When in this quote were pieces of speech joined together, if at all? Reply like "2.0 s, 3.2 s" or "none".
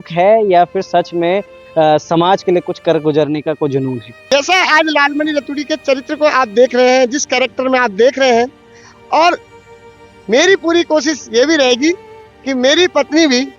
4.3 s